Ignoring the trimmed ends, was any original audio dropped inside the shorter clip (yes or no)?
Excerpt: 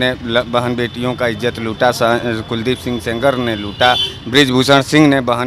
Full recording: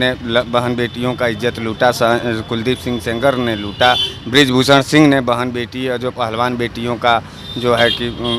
no